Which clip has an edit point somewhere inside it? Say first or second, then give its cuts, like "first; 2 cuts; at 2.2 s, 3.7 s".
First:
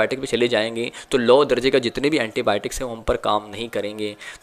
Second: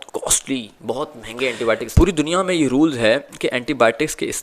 second; 1 cut; at 1.9 s